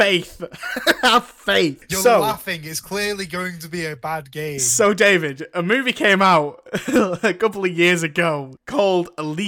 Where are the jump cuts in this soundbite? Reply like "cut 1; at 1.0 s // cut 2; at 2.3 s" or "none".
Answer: cut 1; at 1.9 s // cut 2; at 8.6 s